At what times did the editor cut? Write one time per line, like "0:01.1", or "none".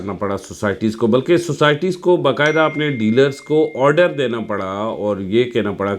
none